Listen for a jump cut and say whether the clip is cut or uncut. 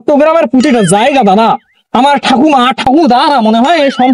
uncut